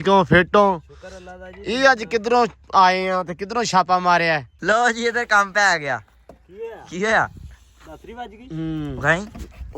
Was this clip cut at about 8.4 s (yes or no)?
no